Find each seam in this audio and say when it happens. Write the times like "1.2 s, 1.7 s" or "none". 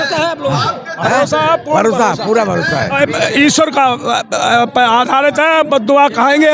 2.9 s